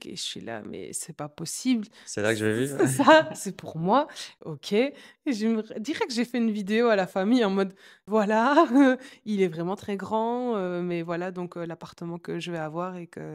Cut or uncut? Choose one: uncut